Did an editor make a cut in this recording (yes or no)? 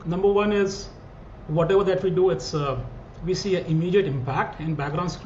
no